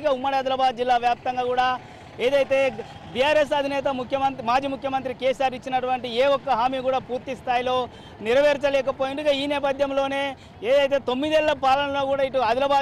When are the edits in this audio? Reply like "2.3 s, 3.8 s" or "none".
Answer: none